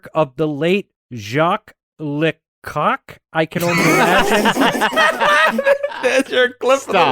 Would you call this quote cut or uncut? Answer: uncut